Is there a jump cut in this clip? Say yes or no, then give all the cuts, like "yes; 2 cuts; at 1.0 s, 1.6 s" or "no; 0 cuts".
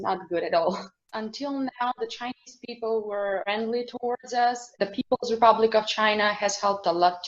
yes; 2 cuts; at 1.0 s, 4.8 s